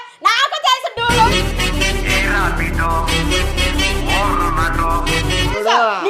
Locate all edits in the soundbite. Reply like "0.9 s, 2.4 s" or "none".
1.1 s